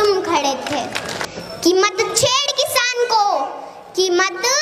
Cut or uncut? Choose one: cut